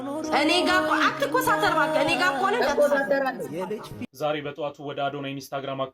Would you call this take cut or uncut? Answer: cut